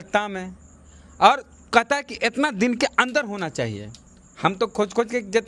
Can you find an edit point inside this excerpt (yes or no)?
no